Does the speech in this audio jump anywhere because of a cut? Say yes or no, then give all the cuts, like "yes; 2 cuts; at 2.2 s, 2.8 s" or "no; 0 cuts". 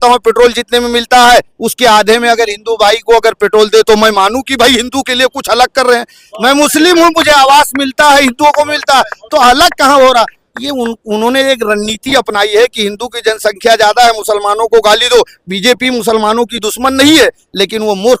no; 0 cuts